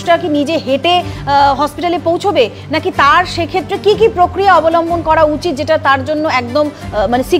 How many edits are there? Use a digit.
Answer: 0